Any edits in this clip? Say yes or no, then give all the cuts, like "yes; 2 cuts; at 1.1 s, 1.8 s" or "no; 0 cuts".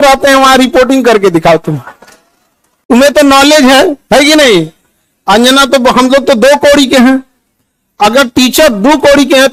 no; 0 cuts